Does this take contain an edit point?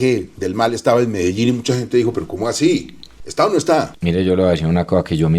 yes; 1 cut; at 3.9 s

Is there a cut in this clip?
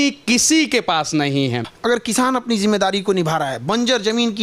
yes; 1 cut; at 1.7 s

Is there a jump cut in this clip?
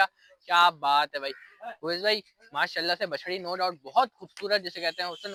no; 0 cuts

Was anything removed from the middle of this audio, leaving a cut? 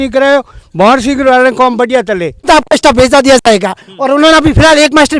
yes; 1 cut; at 2.5 s

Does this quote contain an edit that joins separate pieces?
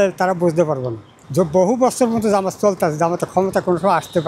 yes; 1 cut; at 1.2 s

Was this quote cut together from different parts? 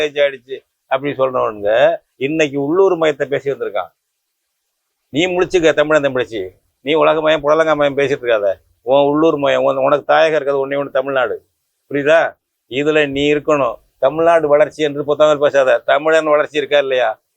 no; 0 cuts

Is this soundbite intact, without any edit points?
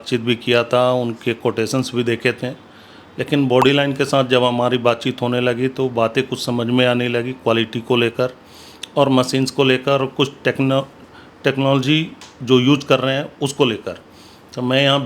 yes; 0 cuts

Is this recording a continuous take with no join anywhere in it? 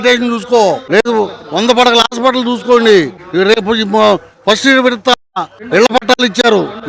yes; 0 cuts

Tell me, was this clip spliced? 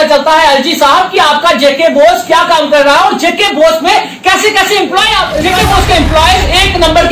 yes; 1 cut; at 5.4 s

